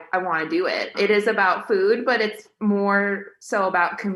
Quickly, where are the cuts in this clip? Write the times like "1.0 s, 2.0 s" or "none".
0.9 s